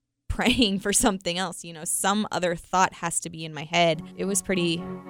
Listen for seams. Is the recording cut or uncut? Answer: cut